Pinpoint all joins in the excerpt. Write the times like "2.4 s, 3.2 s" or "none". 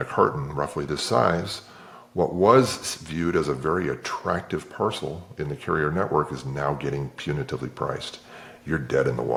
none